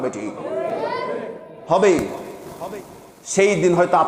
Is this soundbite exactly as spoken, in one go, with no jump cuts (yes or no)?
yes